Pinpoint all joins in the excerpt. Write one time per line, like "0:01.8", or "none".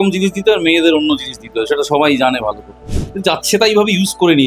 0:02.8